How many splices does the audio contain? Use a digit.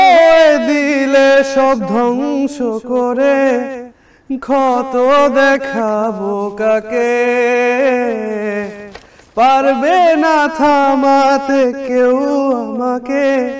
0